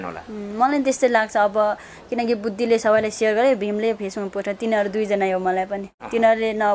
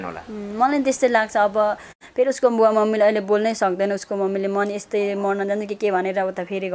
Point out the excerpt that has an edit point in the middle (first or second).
second